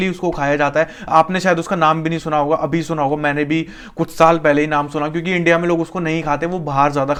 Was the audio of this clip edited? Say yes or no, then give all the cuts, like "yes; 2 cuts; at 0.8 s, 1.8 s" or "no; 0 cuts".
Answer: no; 0 cuts